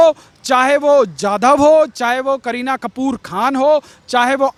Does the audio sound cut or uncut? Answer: uncut